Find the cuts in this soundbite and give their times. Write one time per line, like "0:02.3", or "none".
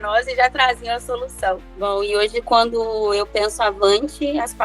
0:01.7